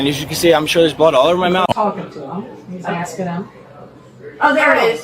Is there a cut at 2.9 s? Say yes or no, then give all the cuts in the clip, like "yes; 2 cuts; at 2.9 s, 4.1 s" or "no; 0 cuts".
no; 1 cut; at 1.7 s